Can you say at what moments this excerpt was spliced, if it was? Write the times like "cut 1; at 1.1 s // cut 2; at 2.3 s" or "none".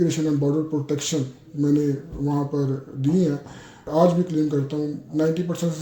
cut 1; at 3.9 s